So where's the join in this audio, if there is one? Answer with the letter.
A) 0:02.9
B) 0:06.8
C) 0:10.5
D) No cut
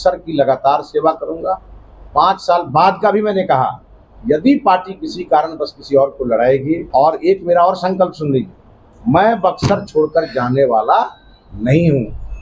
B